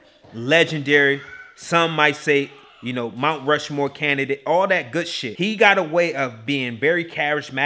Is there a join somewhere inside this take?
yes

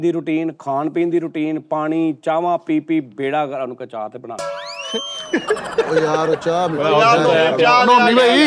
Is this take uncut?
yes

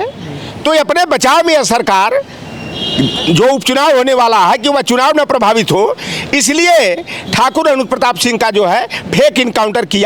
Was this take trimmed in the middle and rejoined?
no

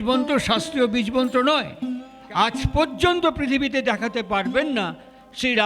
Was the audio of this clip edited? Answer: yes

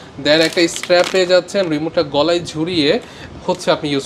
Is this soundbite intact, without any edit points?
yes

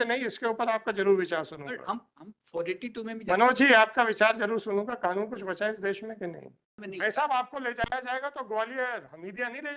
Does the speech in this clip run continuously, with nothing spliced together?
no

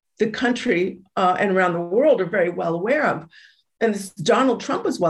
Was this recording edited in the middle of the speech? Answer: no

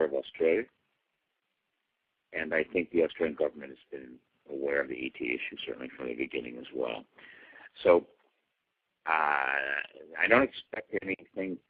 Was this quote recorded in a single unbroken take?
yes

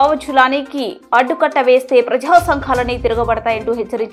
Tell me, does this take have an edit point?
no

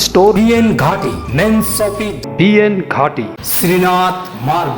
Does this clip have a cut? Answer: yes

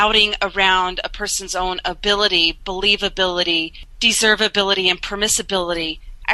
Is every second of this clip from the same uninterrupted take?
yes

